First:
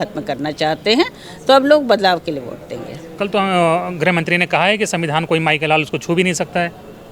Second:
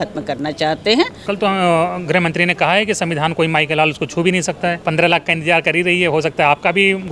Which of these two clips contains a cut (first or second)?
second